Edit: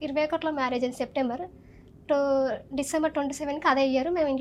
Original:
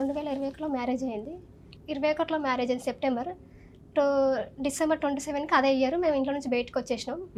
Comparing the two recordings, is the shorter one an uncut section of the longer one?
yes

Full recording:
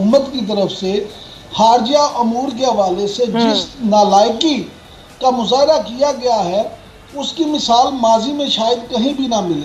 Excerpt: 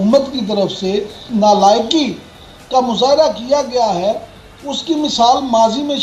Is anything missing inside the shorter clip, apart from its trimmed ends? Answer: yes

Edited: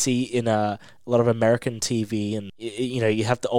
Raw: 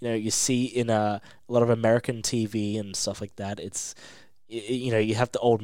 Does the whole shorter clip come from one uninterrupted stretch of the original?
no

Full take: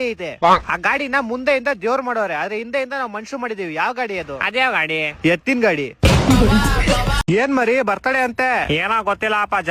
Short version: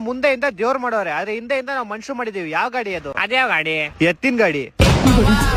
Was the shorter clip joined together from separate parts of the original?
no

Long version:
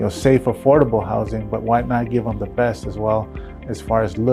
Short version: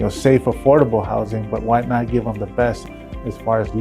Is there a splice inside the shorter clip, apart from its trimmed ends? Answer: yes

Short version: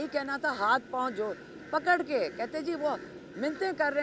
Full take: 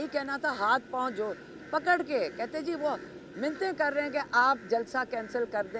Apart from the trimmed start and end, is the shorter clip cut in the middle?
no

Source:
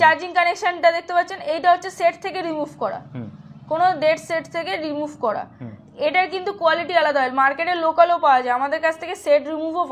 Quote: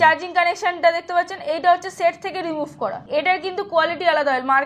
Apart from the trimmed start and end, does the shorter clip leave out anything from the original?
yes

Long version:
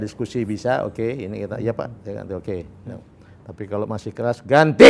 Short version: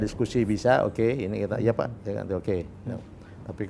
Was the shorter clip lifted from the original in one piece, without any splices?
yes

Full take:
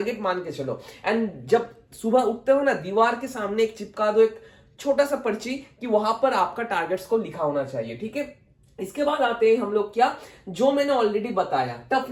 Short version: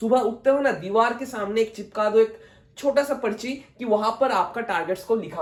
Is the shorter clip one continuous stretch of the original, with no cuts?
yes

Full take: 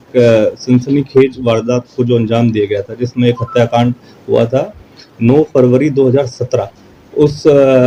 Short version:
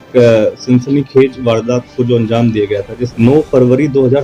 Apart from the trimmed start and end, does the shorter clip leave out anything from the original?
yes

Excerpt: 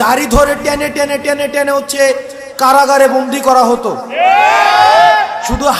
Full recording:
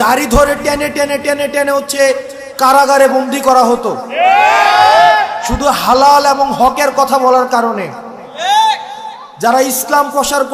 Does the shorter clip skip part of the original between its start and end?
no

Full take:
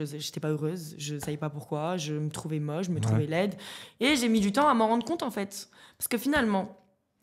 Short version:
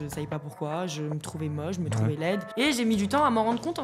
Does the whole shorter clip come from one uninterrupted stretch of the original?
no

